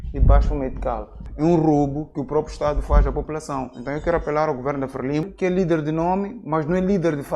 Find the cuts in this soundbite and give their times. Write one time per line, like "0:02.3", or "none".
0:01.2
0:05.3

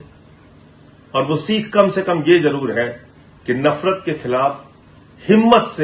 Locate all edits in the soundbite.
none

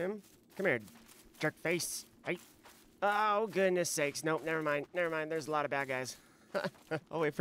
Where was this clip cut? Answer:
none

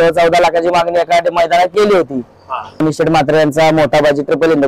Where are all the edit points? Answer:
0:02.8

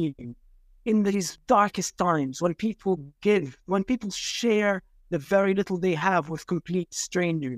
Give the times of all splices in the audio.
0:01.3

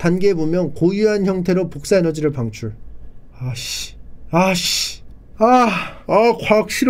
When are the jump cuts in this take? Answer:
none

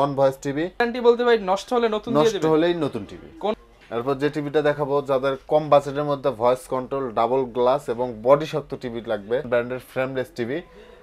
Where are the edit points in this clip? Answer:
0:00.8
0:03.5
0:09.4

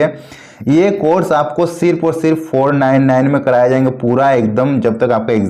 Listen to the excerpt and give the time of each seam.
none

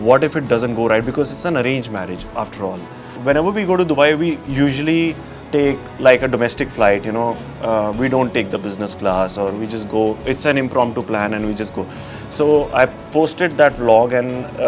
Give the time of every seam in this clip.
0:03.2

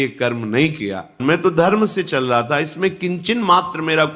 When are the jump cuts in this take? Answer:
0:01.2

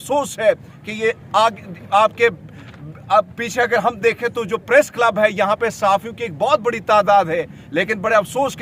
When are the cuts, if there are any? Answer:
none

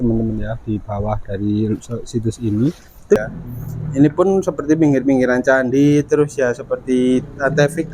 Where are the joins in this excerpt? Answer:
0:03.2

